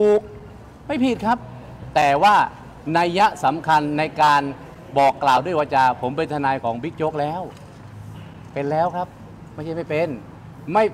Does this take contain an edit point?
no; 0 cuts

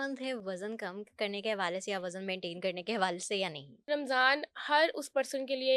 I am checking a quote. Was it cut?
yes; 1 cut; at 3.9 s

